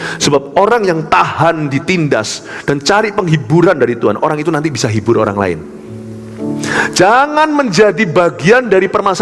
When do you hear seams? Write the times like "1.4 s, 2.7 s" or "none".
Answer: none

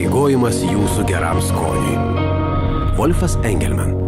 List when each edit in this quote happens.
none

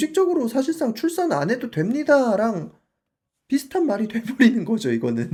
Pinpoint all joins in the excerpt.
none

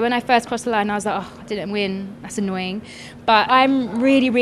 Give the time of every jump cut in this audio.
3.5 s

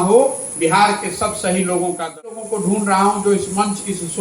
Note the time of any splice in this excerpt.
2.4 s

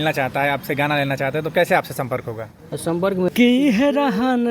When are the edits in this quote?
3.3 s

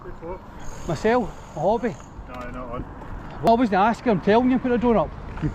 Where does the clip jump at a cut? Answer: 3.5 s

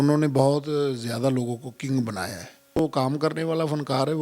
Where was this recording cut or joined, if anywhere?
2.8 s

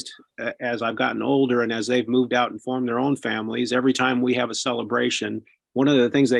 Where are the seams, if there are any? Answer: none

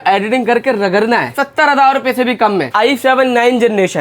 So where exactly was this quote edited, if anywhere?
1.4 s, 2.7 s

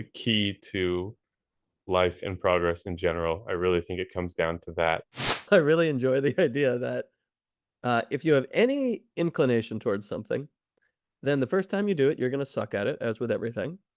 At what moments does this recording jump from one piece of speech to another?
5.4 s

